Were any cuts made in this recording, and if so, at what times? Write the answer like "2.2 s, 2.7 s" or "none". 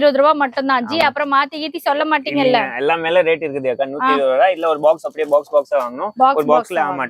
none